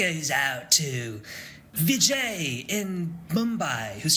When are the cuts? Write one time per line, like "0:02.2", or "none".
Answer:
0:01.6